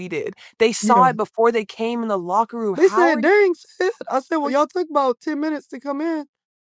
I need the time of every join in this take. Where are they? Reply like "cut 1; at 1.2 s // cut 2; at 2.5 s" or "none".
cut 1; at 2.8 s // cut 2; at 4.5 s